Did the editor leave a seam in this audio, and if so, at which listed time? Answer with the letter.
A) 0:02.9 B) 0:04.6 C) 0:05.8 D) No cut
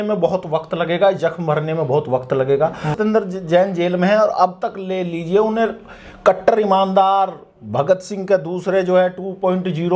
A